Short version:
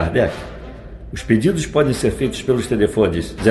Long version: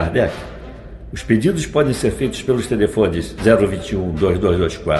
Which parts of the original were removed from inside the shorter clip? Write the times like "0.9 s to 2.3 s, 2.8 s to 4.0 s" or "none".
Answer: none